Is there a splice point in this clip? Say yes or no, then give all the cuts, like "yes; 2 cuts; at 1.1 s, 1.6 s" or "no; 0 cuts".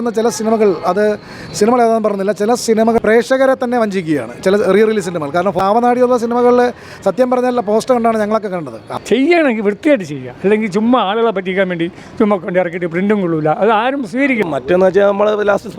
yes; 4 cuts; at 2.8 s, 5.6 s, 9.0 s, 14.4 s